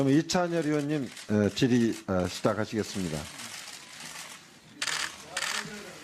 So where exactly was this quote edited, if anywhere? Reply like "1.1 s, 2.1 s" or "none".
1.2 s